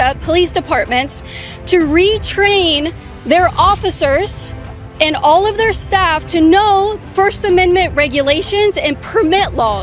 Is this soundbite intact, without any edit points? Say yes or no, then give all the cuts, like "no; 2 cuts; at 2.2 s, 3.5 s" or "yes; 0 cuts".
yes; 0 cuts